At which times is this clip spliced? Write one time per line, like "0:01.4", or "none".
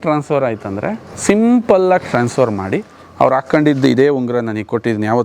0:01.1